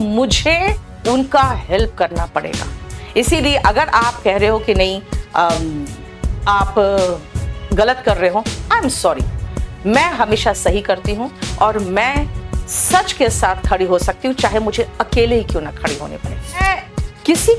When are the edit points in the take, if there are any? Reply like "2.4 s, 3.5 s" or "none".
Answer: 16.6 s